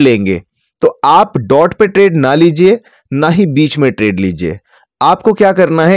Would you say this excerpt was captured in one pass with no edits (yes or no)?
yes